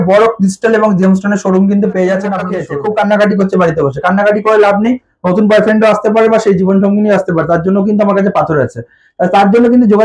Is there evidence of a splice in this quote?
yes; 1 cut; at 2.5 s

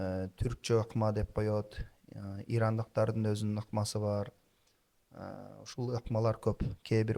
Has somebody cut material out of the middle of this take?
no; 0 cuts

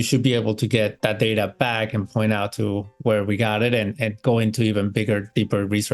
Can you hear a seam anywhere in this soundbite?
no; 0 cuts

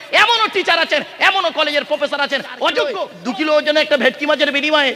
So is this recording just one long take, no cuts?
no; 1 cut; at 3.1 s

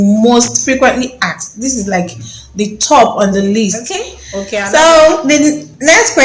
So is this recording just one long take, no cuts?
no; 1 cut; at 4.2 s

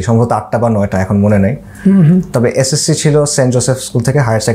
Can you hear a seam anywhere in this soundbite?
no; 0 cuts

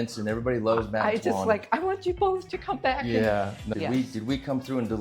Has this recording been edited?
yes; 1 cut; at 3.6 s

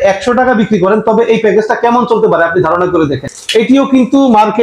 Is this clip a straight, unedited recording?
no; 1 cut; at 3.3 s

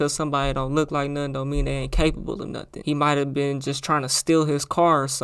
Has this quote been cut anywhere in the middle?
yes; 1 cut; at 2.7 s

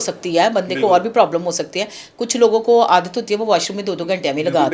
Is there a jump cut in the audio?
no; 0 cuts

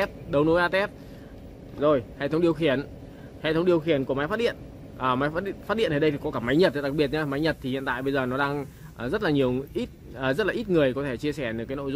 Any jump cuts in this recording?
no; 0 cuts

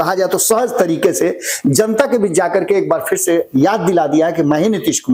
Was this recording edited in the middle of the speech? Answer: no; 0 cuts

